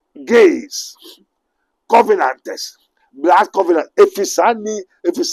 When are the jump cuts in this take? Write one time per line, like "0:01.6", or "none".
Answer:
none